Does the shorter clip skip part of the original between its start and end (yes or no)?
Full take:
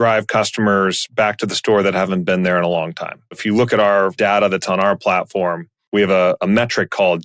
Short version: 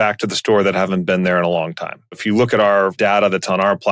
no